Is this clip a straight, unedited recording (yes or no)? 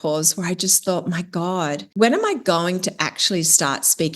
no